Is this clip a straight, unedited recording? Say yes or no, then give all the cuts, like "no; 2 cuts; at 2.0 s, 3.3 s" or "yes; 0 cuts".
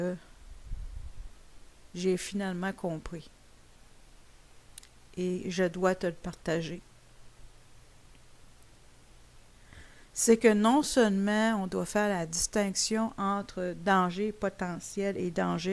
no; 1 cut; at 10.5 s